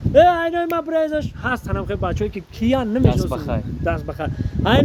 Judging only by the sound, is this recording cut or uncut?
uncut